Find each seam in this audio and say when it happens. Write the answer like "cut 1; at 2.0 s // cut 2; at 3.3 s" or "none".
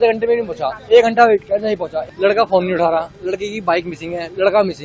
cut 1; at 2.0 s